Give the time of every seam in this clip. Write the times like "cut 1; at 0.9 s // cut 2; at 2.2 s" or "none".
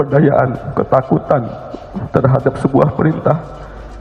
none